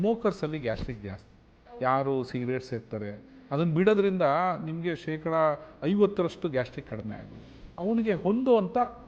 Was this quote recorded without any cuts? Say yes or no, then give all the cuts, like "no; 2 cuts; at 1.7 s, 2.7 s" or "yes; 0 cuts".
no; 1 cut; at 7.6 s